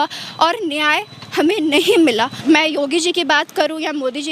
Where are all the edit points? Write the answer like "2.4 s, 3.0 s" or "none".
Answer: 2.3 s